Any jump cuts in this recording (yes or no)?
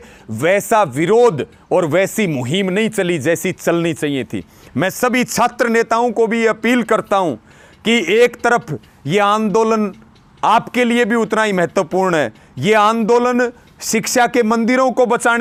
no